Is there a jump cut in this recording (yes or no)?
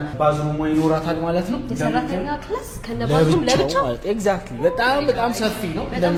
no